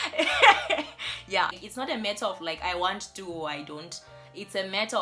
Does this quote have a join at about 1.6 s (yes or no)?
yes